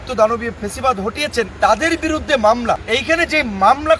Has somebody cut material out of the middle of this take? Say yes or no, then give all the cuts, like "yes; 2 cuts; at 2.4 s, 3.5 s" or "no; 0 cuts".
yes; 2 cuts; at 1.5 s, 2.8 s